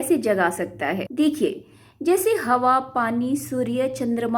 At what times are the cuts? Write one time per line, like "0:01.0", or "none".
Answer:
0:01.0